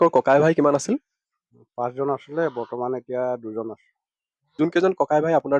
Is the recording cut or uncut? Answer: cut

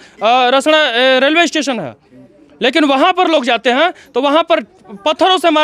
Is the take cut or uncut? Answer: uncut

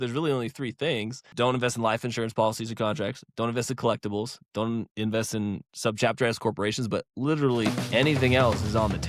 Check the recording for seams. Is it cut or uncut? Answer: cut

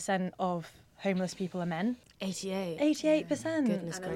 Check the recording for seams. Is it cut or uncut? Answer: cut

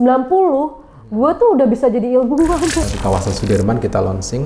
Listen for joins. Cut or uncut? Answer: cut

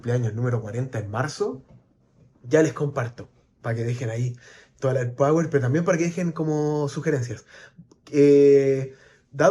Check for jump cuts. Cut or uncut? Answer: uncut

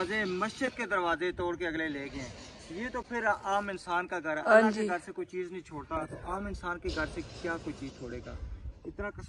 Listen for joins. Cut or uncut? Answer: uncut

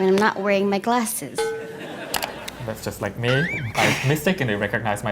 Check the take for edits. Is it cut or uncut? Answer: cut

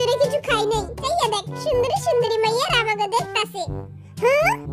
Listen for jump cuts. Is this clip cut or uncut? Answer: cut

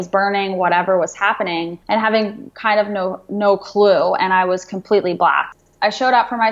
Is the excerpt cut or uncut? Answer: cut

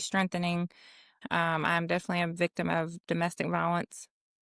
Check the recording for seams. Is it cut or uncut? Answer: cut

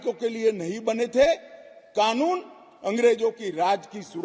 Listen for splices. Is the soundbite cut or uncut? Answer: uncut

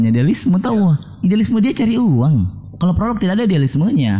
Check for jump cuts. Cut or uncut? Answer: cut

